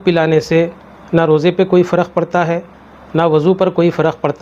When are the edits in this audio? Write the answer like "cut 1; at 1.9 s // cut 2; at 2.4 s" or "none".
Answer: none